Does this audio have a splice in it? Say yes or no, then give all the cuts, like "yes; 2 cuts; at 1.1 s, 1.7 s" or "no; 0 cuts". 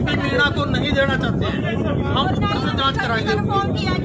no; 0 cuts